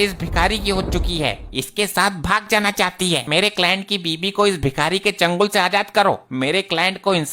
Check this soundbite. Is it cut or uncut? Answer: cut